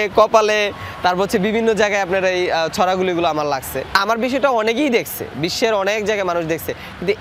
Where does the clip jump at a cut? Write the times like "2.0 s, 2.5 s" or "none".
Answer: none